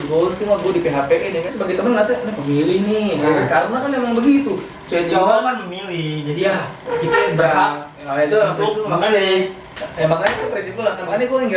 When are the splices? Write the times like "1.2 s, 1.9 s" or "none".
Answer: 1.5 s